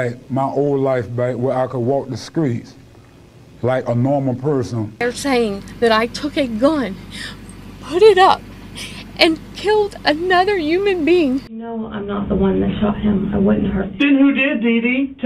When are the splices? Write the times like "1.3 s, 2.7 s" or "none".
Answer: 5.0 s, 11.5 s